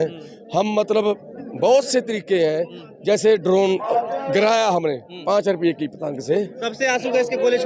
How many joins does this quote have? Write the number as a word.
zero